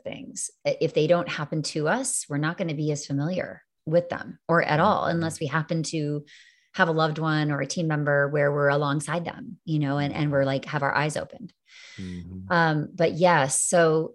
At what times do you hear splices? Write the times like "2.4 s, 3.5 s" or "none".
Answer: none